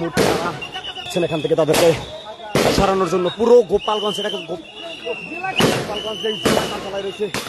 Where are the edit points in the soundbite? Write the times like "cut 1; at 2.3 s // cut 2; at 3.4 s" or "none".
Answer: cut 1; at 1.1 s

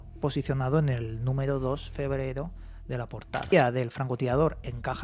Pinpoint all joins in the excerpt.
cut 1; at 3.5 s

